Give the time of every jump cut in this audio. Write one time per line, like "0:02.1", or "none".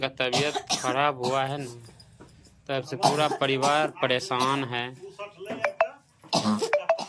none